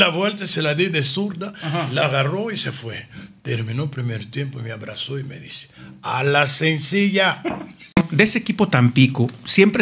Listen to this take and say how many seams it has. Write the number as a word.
one